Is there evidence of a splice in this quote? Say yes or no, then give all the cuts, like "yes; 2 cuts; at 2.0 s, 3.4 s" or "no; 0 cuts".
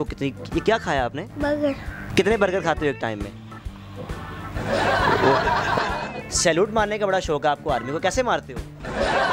yes; 2 cuts; at 2.0 s, 5.8 s